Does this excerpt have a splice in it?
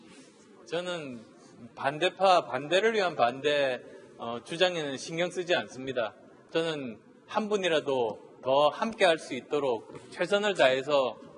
no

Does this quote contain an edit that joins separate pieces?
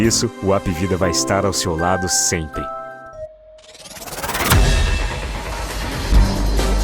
yes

